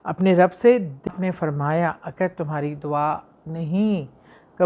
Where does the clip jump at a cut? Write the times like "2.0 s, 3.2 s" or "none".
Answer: 1.1 s